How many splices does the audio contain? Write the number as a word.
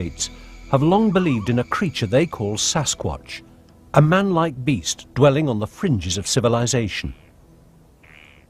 one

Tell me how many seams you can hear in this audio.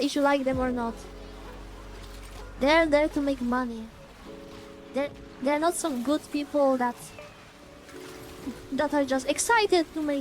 zero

